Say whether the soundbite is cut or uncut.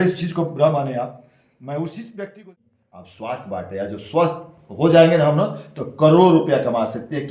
cut